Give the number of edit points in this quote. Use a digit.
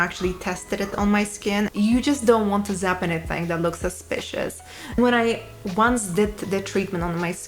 2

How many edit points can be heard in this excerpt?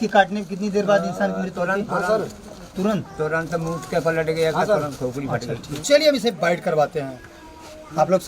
1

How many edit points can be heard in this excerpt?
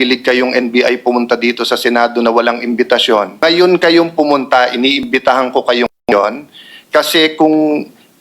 1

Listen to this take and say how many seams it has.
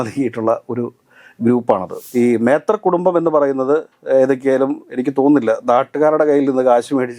1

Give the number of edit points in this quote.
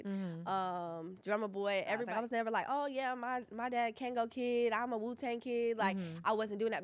1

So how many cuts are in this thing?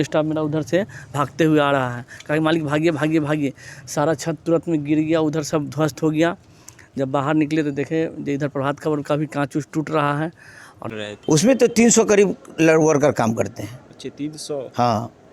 1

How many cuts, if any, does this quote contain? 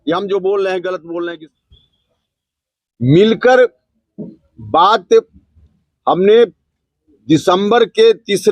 1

